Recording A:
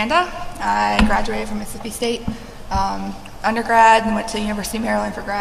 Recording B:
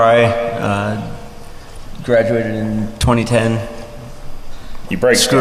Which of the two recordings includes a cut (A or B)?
A